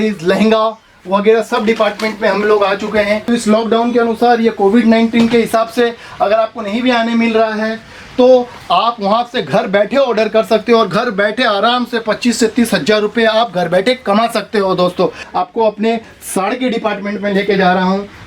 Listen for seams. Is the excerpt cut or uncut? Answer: cut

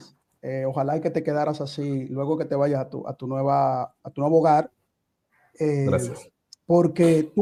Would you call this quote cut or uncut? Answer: uncut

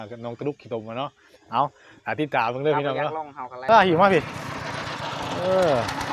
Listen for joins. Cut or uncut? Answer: cut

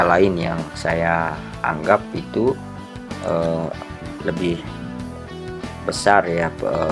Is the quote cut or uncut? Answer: uncut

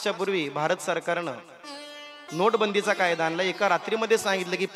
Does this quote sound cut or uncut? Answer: uncut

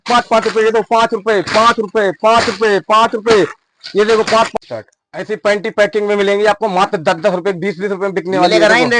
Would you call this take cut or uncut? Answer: uncut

